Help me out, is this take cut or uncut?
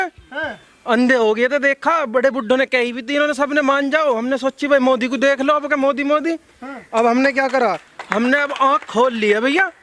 uncut